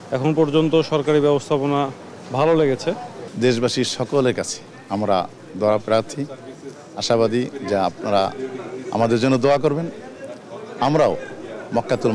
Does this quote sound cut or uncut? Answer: uncut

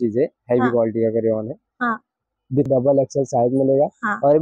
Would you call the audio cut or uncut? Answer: cut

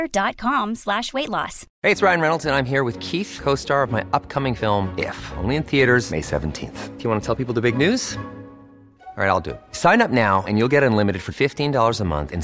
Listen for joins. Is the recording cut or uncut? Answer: cut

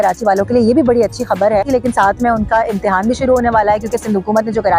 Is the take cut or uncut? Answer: cut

